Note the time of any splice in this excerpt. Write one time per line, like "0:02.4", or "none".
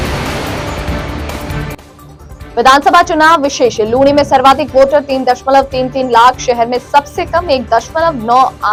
none

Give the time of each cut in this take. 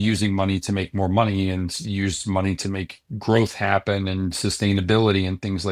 none

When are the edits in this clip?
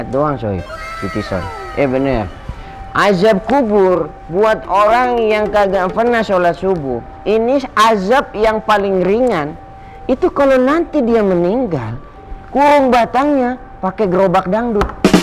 none

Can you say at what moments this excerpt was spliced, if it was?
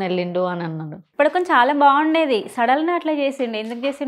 0:01.0

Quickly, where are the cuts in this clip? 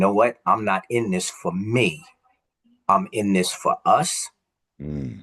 none

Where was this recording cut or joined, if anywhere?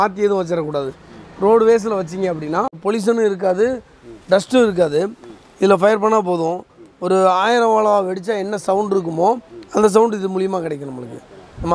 0:02.8

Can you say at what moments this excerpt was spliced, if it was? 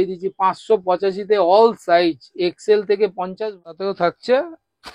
0:03.3

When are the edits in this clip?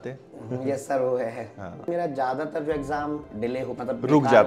0:01.9
0:03.3

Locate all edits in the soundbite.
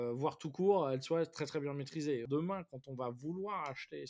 0:02.2

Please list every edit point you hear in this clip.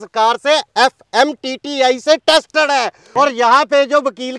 0:03.0

